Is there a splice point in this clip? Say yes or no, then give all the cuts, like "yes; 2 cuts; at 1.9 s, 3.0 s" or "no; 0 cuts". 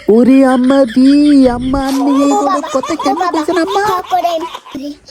no; 0 cuts